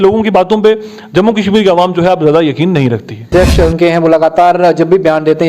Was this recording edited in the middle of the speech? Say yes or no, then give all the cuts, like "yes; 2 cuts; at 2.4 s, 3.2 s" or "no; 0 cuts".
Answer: yes; 1 cut; at 3.3 s